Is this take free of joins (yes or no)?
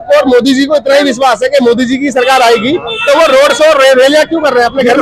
yes